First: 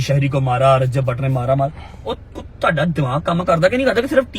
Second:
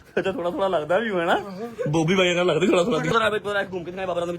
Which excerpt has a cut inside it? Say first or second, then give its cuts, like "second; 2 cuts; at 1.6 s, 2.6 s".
second; 1 cut; at 3.1 s